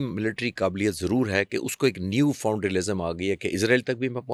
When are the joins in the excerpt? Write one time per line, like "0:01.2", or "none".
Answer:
none